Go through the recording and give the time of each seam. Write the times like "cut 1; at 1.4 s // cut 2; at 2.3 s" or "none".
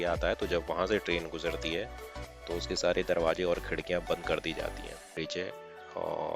cut 1; at 5.1 s